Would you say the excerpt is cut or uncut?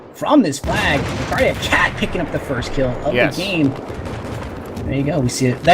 cut